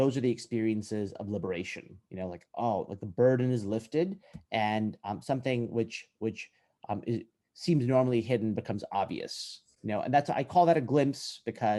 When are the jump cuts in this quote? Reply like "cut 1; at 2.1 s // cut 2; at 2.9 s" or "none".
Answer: none